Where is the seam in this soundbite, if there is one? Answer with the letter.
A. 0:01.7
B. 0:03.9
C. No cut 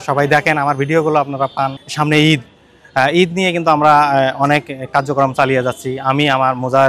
A